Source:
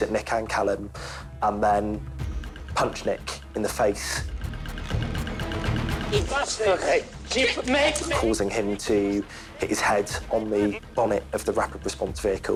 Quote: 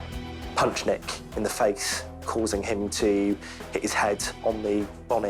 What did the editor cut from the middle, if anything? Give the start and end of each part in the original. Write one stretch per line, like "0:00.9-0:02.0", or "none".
0:04.5-0:08.2